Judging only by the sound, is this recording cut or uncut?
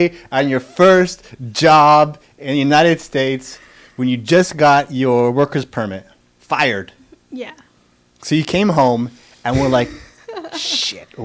uncut